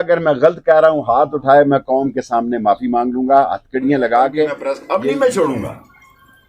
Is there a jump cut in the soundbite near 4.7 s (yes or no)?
yes